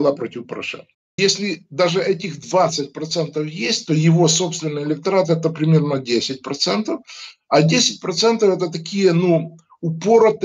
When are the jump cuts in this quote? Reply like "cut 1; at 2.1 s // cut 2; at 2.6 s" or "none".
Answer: cut 1; at 1.1 s